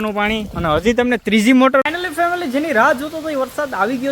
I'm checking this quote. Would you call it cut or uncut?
cut